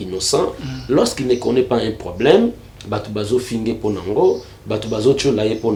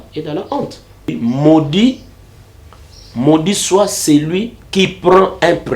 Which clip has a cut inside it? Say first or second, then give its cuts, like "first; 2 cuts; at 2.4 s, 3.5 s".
second; 1 cut; at 1.1 s